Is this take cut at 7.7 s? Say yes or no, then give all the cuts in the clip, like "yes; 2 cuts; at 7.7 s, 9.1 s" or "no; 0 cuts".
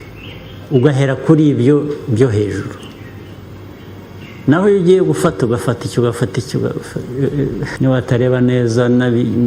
yes; 1 cut; at 7.7 s